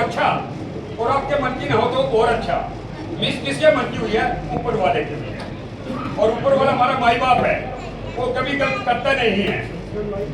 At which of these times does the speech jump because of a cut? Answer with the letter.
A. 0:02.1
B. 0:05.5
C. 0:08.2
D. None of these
D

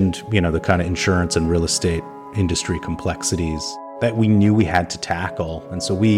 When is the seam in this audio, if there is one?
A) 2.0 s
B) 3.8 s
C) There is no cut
B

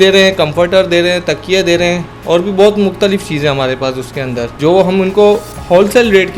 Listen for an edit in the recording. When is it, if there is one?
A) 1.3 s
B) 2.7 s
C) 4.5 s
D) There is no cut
C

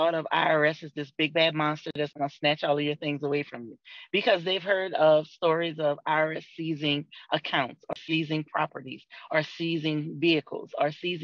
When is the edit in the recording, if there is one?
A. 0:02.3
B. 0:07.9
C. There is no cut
B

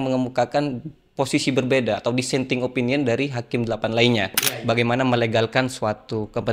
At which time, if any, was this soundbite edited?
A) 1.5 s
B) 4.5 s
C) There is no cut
B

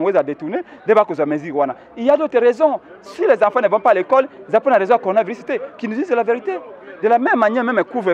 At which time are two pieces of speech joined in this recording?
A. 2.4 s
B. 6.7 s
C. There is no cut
C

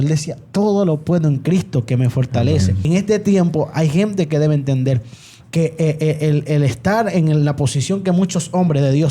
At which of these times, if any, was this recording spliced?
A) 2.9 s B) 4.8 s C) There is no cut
A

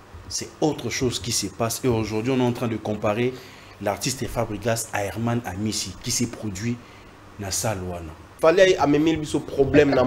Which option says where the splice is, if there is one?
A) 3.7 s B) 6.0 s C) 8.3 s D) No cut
C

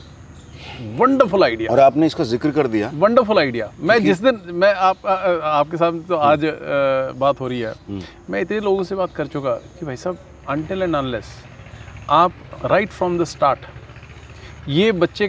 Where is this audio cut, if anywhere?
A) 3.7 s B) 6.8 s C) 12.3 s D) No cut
D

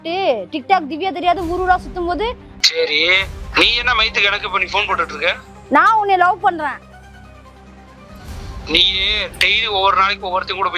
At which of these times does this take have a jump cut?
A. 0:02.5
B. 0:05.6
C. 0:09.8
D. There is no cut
A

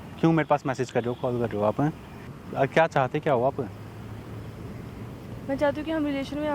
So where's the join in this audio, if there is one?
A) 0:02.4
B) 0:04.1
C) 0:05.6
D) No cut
A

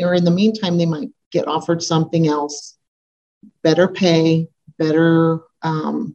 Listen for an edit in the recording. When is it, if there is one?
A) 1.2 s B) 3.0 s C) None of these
C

